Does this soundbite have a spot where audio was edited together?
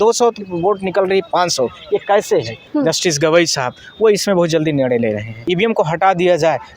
yes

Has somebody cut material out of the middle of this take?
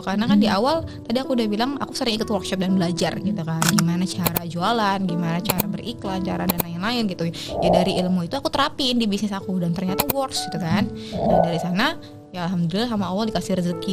no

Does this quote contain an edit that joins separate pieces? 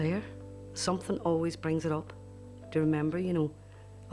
no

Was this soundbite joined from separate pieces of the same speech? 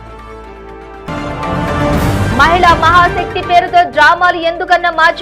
yes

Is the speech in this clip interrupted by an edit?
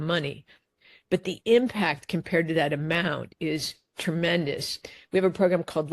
yes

